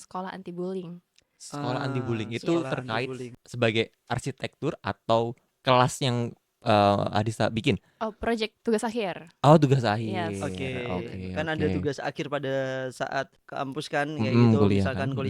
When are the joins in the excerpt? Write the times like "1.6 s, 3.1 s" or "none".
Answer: 3.3 s, 13.4 s